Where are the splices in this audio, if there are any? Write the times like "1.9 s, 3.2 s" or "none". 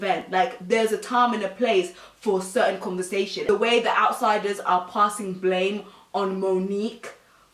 3.4 s

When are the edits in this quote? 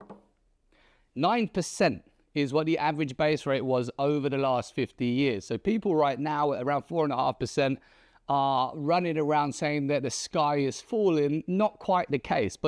none

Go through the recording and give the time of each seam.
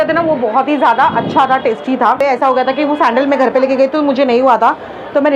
2.2 s

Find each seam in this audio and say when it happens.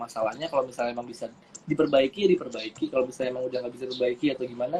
none

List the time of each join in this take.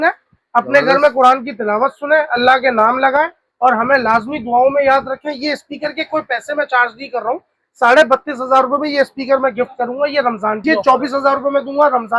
10.6 s

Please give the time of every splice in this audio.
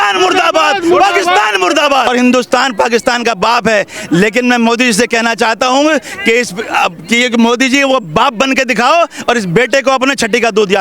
2.1 s

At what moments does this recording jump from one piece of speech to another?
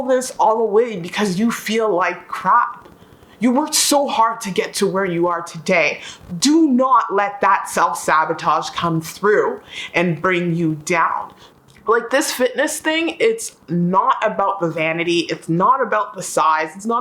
11.7 s

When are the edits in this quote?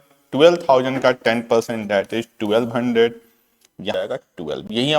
4.0 s

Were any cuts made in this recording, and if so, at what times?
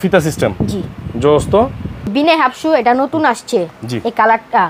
2.1 s

